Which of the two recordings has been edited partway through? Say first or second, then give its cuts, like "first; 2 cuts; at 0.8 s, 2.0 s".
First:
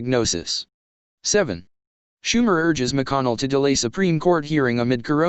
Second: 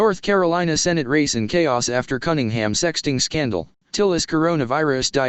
first; 1 cut; at 1.5 s